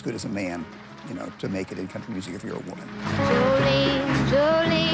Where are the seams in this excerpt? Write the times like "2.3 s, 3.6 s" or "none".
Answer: 3.0 s